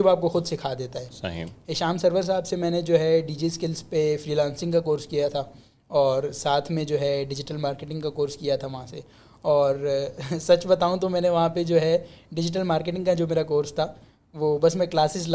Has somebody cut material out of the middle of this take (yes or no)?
no